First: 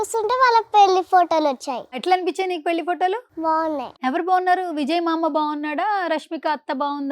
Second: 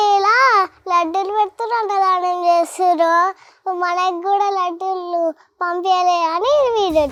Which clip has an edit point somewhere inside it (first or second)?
first